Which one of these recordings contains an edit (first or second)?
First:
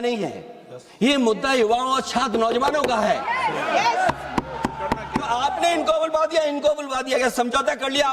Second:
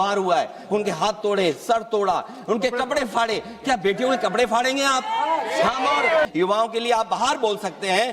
second